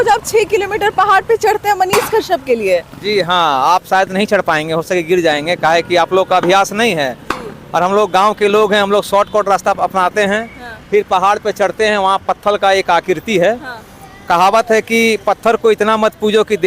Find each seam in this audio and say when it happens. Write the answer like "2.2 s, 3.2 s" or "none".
none